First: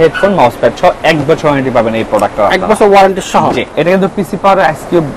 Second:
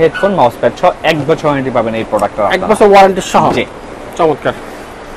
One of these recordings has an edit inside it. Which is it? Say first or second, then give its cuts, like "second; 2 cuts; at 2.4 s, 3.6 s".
first; 1 cut; at 3.7 s